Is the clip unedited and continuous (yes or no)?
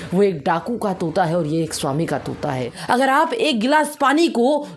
no